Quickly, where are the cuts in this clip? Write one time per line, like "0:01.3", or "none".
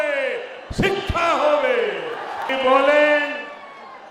0:02.5